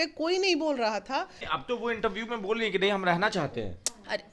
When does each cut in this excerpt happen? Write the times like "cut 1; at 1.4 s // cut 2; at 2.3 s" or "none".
cut 1; at 1.5 s